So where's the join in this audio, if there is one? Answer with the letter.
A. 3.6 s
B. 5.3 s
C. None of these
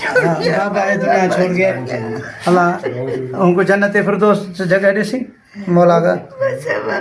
C